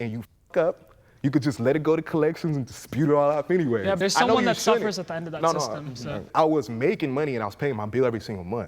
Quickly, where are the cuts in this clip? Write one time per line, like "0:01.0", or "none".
0:04.0
0:06.2

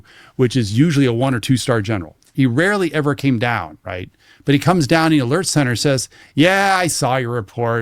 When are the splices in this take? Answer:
0:02.2

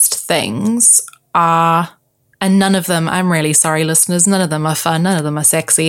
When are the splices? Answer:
none

